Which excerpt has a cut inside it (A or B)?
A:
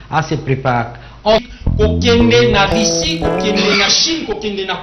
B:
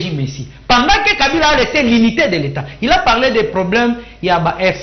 A